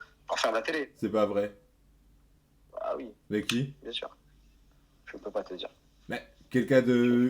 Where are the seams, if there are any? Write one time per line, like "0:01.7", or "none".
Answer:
none